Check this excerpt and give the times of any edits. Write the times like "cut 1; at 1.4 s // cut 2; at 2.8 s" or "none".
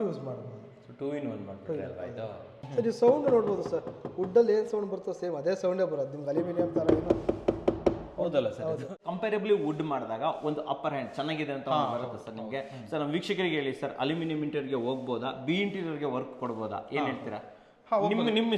cut 1; at 2.5 s // cut 2; at 8.9 s